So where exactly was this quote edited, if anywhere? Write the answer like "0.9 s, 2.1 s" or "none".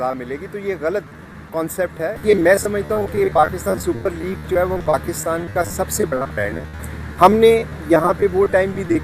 2.2 s